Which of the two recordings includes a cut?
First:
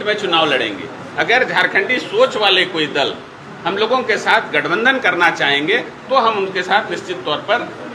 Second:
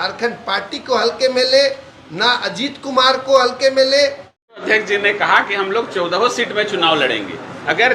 second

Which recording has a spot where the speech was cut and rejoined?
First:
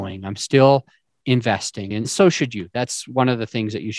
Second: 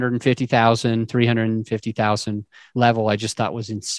first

